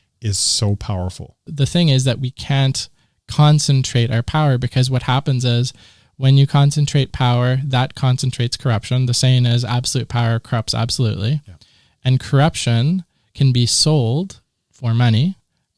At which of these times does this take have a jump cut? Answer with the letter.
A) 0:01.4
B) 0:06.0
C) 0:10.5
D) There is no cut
A